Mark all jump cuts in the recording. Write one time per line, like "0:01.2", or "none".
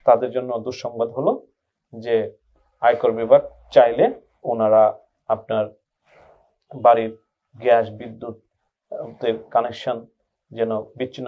none